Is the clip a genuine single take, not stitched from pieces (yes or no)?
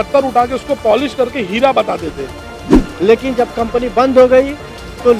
no